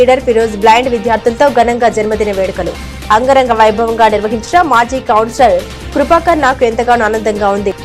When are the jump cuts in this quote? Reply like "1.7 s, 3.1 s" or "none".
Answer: none